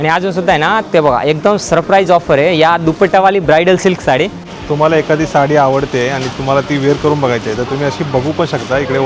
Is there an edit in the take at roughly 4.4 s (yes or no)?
yes